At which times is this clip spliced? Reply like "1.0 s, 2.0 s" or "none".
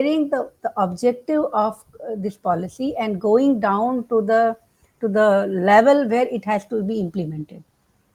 none

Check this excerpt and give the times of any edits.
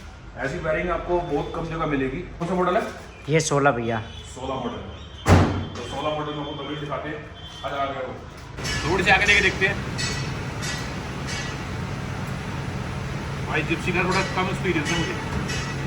2.4 s, 8.6 s

